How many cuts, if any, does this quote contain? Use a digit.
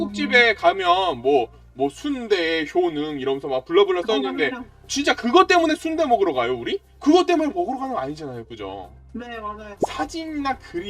1